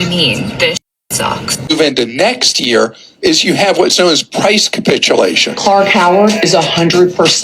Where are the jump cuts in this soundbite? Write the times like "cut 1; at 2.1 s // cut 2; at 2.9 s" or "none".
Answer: cut 1; at 1.7 s

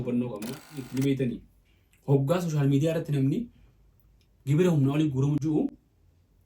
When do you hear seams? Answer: cut 1; at 0.9 s // cut 2; at 5.4 s

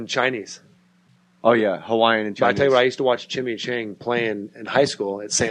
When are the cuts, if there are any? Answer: none

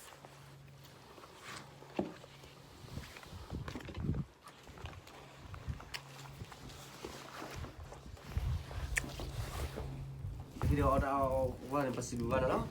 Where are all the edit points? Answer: cut 1; at 10.6 s

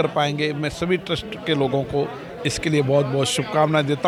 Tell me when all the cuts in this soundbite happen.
none

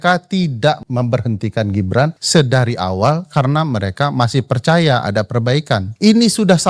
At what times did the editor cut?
cut 1; at 0.8 s // cut 2; at 2.2 s // cut 3; at 5.9 s

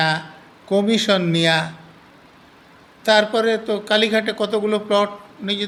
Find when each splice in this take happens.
none

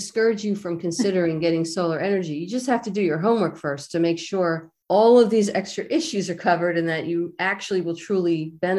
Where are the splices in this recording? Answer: cut 1; at 4.7 s

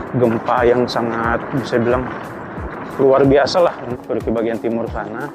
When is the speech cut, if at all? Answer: cut 1; at 4.0 s

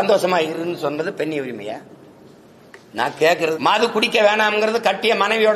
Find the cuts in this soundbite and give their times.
cut 1; at 3.6 s

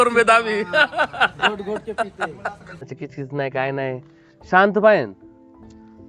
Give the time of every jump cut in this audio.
cut 1; at 2.9 s

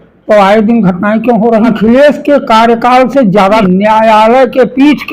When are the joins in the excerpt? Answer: cut 1; at 1.8 s // cut 2; at 3.6 s

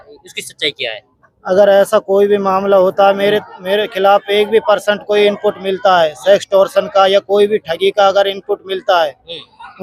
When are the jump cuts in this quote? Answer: none

